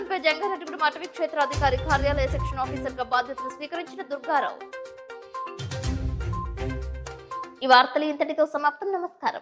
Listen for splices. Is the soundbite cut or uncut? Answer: uncut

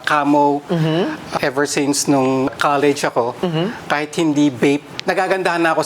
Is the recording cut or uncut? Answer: cut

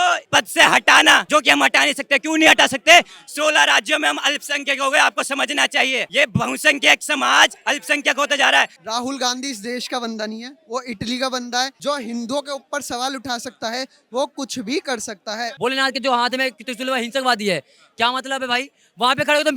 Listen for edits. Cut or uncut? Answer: cut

